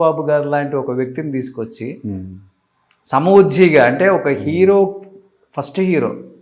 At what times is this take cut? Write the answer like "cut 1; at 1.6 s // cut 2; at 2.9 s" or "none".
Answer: none